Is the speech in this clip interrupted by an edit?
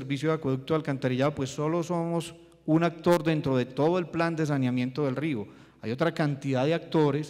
yes; 1 cut; at 2.8 s

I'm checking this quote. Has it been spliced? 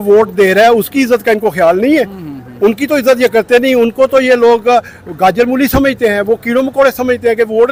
no; 0 cuts

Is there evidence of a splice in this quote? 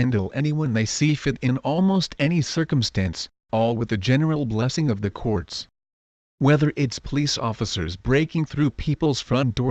yes; 1 cut; at 5.7 s

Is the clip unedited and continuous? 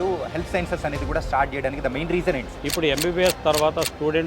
no; 1 cut; at 2.5 s

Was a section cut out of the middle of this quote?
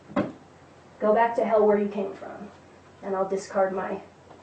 yes; 1 cut; at 1.4 s

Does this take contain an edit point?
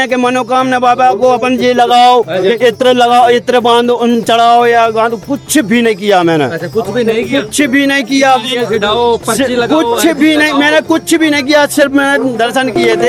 no; 0 cuts

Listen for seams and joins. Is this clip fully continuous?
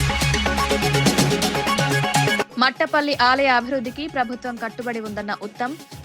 no; 1 cut; at 2.5 s

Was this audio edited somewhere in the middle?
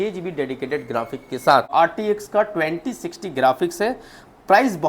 yes; 1 cut; at 1.7 s

